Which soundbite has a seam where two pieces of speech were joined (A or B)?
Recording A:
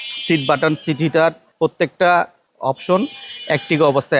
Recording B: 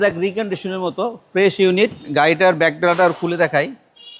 A